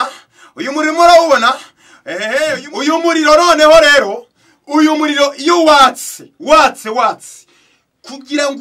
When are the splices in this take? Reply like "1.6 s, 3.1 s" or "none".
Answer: 2.3 s